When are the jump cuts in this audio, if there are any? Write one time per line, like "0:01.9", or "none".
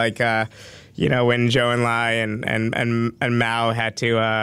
none